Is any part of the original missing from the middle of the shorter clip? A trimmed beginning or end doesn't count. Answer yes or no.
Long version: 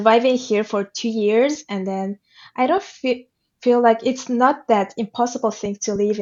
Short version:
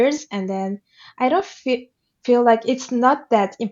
no